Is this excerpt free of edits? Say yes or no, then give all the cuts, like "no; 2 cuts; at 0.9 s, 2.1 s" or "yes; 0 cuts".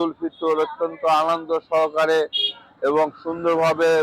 yes; 0 cuts